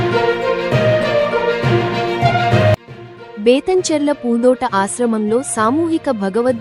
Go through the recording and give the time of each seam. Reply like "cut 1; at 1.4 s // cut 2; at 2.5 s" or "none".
none

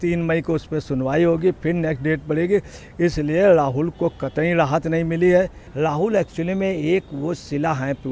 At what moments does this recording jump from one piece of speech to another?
cut 1; at 5.6 s

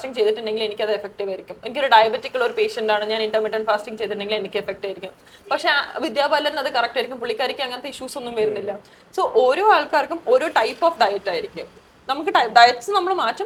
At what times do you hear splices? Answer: none

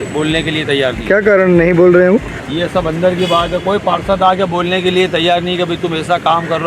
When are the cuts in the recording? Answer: cut 1; at 2.4 s

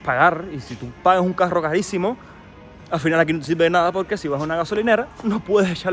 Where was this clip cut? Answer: none

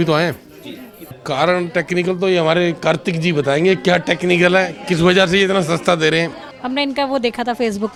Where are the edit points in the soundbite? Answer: none

